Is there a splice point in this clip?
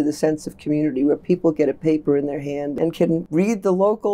yes; 1 cut; at 2.8 s

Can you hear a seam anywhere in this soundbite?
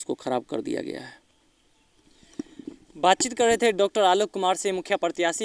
no; 0 cuts

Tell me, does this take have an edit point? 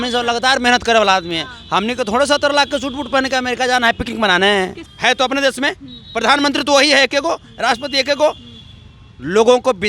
yes; 1 cut; at 4.8 s

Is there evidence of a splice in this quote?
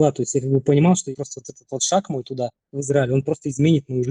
yes; 1 cut; at 1.0 s

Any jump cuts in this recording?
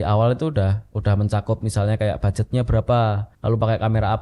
yes; 1 cut; at 3.3 s

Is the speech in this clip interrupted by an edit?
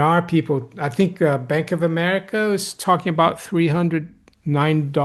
no; 0 cuts

